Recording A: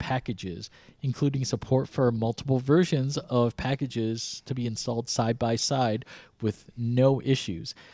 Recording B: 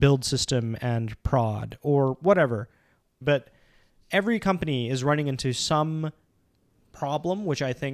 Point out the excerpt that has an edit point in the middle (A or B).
B